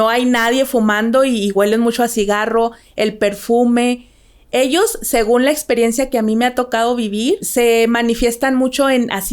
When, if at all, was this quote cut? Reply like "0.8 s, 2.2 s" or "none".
7.5 s